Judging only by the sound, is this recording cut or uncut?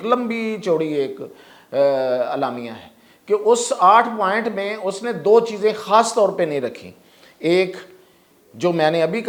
uncut